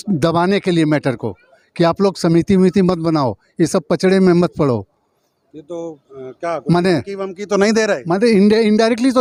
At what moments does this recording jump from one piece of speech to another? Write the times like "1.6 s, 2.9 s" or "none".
none